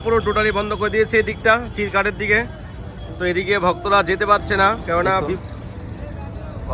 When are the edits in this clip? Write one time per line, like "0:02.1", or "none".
0:05.4